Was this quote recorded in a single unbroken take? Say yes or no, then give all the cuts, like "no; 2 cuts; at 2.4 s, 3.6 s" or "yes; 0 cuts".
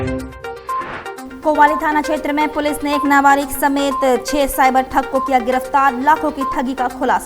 no; 1 cut; at 1.3 s